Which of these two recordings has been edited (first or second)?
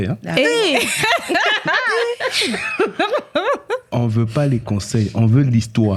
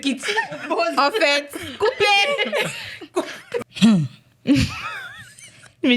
second